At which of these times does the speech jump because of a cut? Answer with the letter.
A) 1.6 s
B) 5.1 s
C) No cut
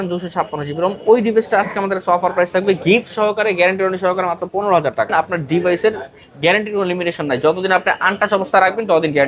B